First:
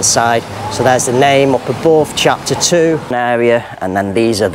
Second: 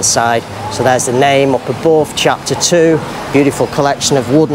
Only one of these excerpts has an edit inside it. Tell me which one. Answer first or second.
first